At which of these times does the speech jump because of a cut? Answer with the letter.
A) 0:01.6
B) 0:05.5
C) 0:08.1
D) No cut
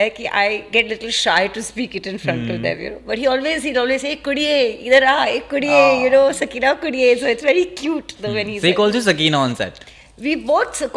D